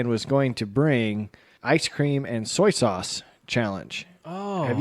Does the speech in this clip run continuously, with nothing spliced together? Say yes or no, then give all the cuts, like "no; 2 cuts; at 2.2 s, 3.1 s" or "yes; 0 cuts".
no; 1 cut; at 1.5 s